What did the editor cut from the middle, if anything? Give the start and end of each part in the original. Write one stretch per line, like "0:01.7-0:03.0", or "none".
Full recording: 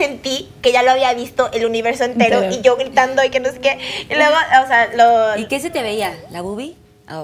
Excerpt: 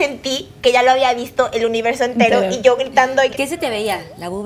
0:03.3-0:05.4